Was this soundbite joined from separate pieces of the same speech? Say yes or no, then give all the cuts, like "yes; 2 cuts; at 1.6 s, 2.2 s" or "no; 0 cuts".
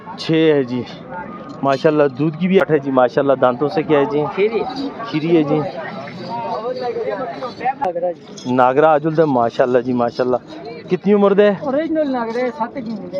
yes; 2 cuts; at 2.6 s, 7.8 s